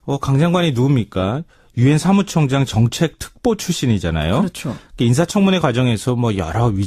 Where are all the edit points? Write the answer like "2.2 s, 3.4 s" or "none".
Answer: none